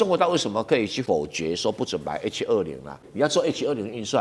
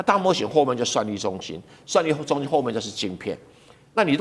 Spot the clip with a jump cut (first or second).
first